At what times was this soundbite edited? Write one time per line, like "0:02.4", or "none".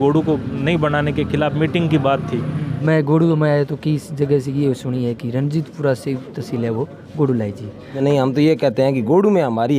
0:02.7
0:08.0